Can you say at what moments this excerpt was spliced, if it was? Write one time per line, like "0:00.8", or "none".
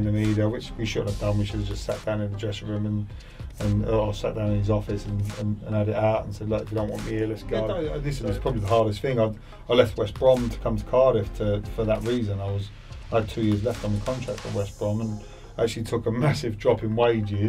0:07.8